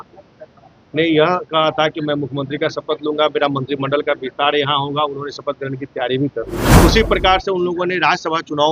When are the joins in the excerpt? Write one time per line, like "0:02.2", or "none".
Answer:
0:06.7

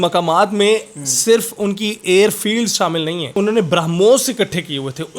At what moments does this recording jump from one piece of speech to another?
0:03.3

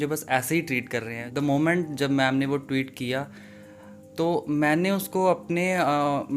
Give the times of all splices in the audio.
0:01.2

